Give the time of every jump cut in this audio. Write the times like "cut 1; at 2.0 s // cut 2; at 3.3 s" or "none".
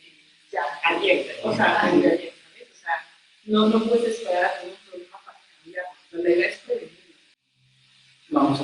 cut 1; at 7.4 s